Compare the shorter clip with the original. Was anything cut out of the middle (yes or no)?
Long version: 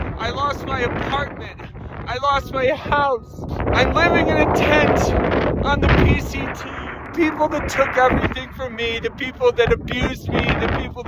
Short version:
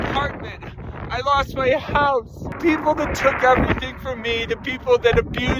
yes